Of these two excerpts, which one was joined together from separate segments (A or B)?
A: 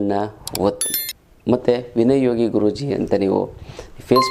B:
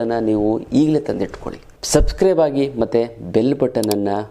B